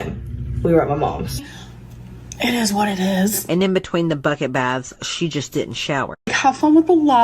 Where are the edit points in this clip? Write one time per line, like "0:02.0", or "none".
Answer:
0:06.1

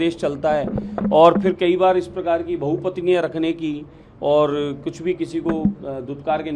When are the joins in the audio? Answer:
none

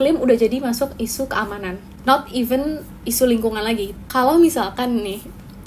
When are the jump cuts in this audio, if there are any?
0:01.9
0:04.0

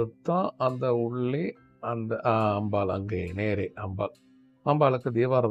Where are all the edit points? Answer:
none

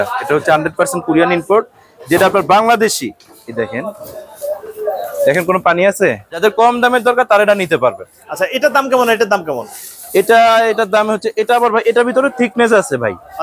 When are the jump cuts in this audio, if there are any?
0:06.3

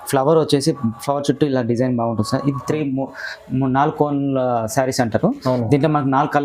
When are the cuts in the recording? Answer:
none

